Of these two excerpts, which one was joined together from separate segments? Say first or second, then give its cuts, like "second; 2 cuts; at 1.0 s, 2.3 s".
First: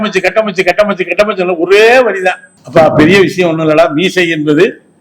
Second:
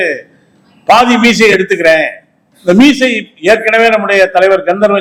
first; 1 cut; at 2.5 s